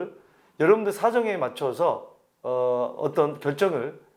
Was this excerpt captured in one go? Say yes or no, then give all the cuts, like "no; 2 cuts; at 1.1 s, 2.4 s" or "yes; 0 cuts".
yes; 0 cuts